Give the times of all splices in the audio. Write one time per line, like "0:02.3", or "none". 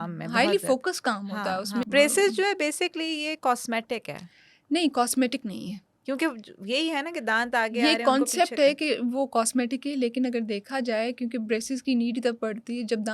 0:01.9